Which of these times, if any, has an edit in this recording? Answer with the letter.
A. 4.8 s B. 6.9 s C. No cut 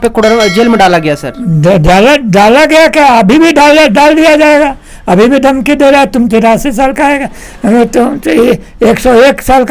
C